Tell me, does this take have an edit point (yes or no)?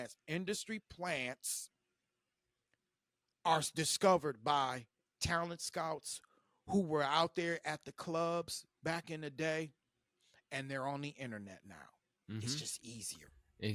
no